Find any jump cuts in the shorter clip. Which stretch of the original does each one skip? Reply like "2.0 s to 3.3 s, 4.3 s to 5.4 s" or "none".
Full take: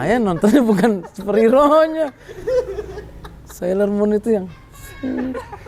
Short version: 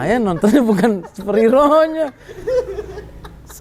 none

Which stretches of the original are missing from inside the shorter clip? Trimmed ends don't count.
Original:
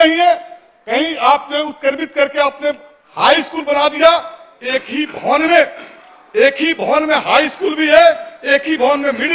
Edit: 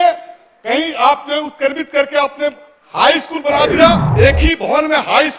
4.3 s to 6.2 s

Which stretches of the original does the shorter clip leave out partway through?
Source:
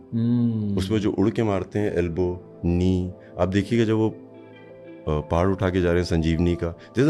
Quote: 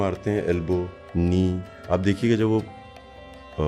none

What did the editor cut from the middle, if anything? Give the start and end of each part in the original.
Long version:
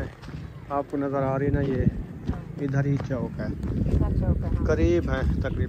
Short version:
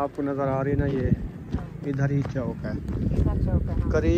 none

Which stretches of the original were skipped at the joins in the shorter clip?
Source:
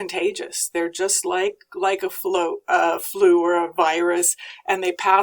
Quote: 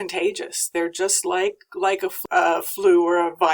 2.2 s to 2.6 s

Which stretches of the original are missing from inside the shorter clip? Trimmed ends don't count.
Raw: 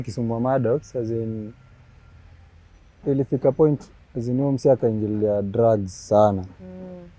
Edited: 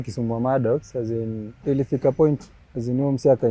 1.5 s to 2.9 s

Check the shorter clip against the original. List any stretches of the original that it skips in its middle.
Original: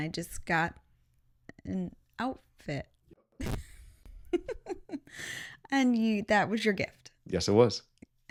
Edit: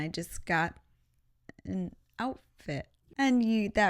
3.0 s to 5.5 s

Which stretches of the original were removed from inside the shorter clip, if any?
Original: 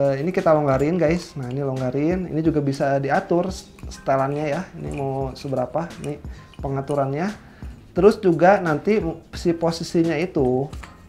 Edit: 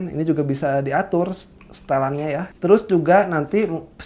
4.7 s to 7.8 s

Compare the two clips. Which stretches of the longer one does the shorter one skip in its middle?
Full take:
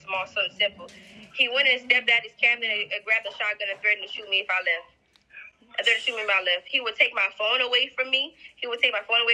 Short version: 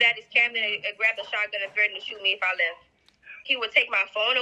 5.5 s to 6.7 s

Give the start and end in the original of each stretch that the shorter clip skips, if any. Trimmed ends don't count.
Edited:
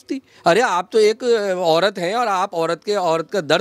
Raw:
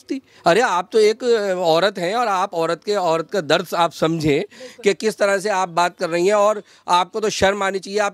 none

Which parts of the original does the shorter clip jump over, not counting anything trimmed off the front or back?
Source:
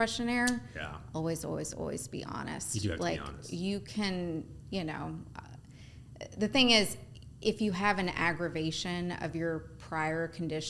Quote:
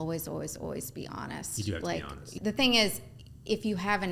3.5 s to 6.3 s

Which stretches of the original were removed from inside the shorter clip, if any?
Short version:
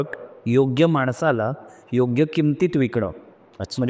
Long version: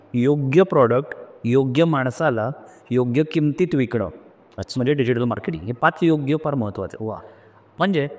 none

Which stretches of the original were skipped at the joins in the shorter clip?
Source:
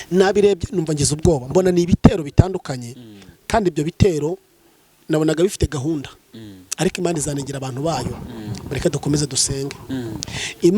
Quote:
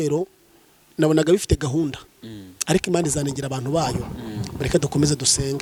none

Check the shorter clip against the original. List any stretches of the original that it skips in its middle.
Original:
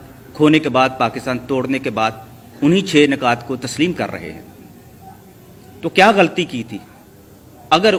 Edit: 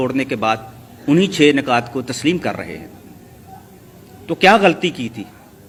none

